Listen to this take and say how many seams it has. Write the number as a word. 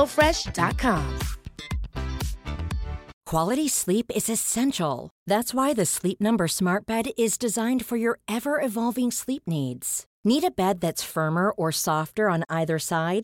one